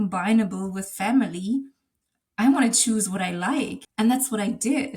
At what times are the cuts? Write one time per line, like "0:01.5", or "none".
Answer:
0:03.8